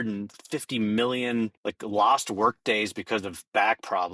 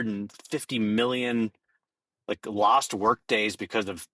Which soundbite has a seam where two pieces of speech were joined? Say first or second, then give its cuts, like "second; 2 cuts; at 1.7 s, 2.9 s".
first; 1 cut; at 1.6 s